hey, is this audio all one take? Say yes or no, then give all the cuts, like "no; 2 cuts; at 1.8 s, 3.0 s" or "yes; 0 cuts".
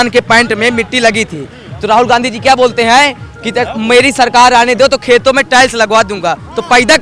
yes; 0 cuts